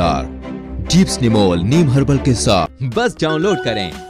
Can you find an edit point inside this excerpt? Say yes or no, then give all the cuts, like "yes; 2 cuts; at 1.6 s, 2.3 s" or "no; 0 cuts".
yes; 1 cut; at 2.8 s